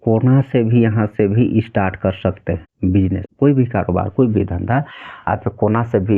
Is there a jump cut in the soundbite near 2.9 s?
yes; 1 cut; at 2.9 s

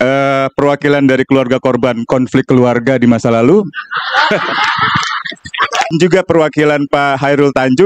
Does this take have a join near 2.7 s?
no; 1 cut; at 5.9 s

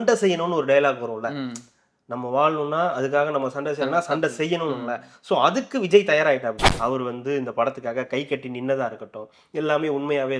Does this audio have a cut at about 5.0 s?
no; 1 cut; at 6.7 s

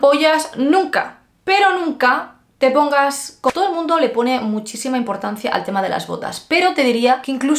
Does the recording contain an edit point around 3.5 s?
yes; 1 cut; at 3.5 s

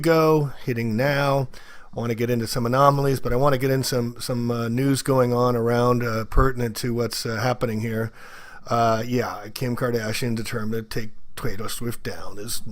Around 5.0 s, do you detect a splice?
yes; 1 cut; at 5.0 s

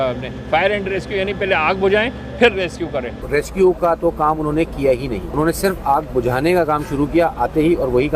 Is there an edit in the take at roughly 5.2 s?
yes; 2 cuts; at 3.2 s, 5.2 s

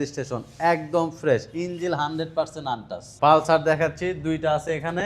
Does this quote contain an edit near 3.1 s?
yes; 1 cut; at 3.1 s

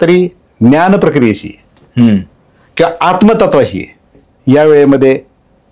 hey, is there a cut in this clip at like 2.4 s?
no; 1 cut; at 4.2 s

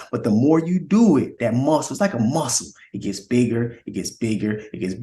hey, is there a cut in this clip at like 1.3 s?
yes; 1 cut; at 1.3 s

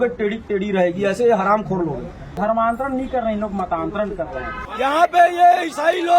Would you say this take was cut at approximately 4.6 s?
yes; 2 cuts; at 2.2 s, 4.6 s

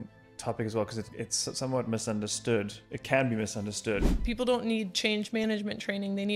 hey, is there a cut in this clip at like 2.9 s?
no; 1 cut; at 4.2 s

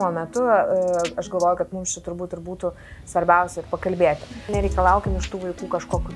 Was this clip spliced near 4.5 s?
yes; 1 cut; at 4.5 s

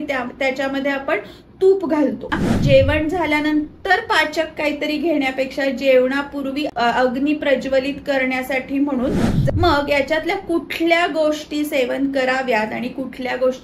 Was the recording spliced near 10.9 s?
no; 3 cuts; at 2.5 s, 6.7 s, 9.2 s

